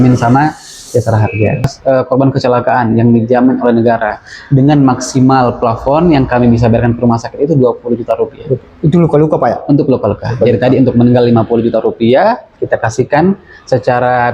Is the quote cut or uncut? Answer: cut